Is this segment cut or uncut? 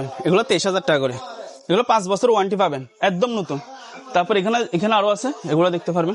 uncut